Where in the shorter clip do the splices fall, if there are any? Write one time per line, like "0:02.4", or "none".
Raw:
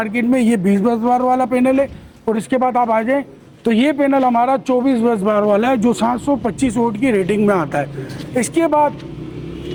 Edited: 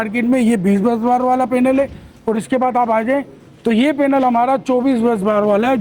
none